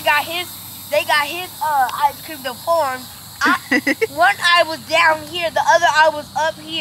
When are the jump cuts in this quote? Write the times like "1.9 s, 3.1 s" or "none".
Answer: none